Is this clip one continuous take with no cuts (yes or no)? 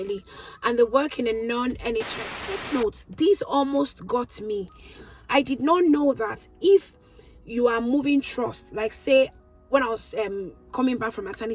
no